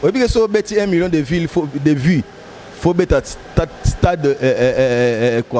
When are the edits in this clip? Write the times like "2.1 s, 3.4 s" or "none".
none

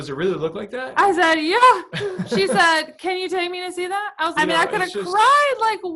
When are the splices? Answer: 4.3 s

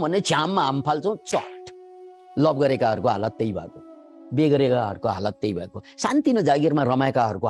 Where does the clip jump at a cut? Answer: none

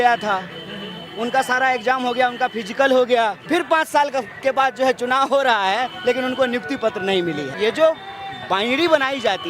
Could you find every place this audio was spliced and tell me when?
3.4 s, 7.5 s

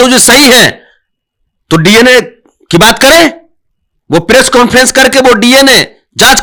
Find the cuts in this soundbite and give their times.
none

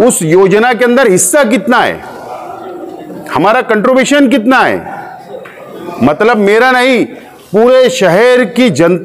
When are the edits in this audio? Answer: none

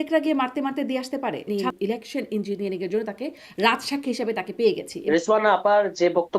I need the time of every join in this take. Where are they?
1.5 s, 4.9 s

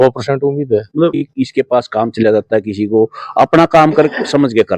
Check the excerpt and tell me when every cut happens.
1.2 s

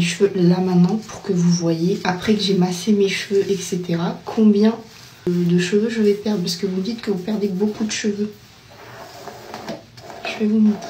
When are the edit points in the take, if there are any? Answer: 2.0 s, 5.2 s

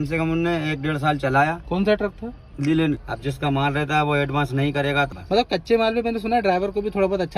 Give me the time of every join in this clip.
3.1 s, 5.1 s

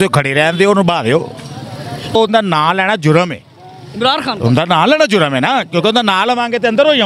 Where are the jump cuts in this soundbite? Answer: 2.1 s

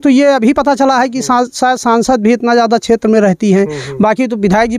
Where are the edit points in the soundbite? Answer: none

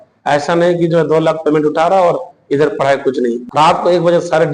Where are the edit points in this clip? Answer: 3.4 s

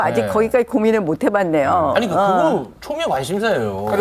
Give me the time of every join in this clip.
none

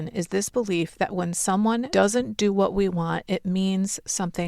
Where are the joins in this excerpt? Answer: 1.9 s

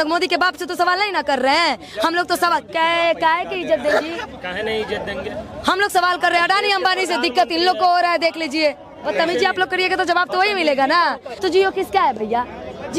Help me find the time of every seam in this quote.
9.1 s, 11.3 s

